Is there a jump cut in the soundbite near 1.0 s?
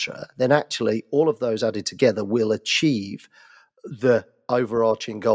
no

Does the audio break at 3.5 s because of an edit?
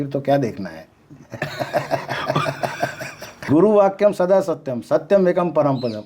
yes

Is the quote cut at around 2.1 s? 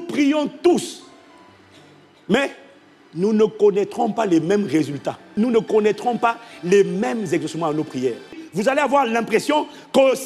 no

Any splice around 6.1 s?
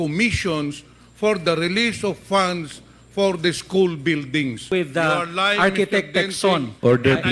no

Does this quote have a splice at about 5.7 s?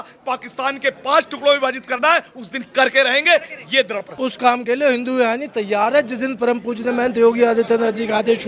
no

